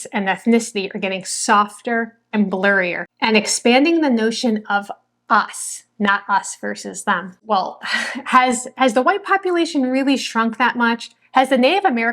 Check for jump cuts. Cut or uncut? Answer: cut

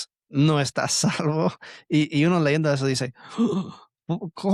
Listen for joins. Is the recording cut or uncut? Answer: uncut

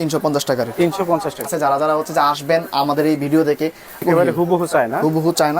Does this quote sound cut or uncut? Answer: cut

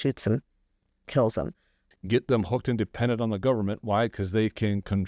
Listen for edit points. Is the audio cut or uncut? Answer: cut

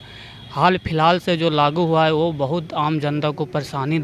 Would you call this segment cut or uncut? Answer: uncut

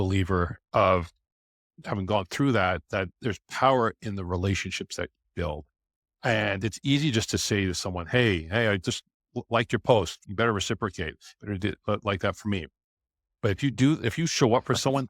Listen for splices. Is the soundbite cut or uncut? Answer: cut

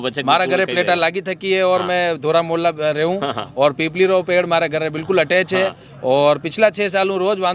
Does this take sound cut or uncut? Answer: uncut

